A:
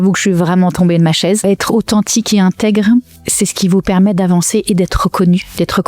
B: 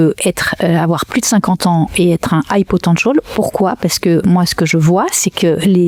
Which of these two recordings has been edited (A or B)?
A